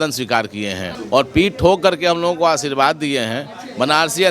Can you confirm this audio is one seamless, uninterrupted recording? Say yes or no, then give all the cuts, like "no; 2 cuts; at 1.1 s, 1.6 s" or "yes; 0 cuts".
no; 1 cut; at 0.9 s